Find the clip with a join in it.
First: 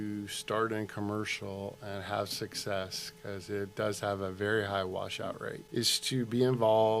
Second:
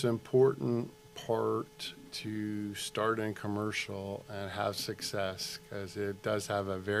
first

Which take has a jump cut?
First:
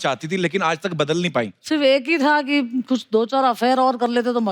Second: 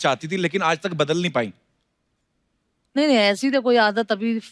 first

